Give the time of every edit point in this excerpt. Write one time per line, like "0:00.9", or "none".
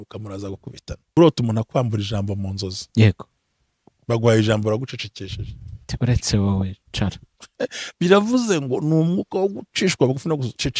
0:01.2